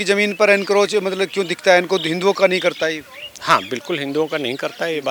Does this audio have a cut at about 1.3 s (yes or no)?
no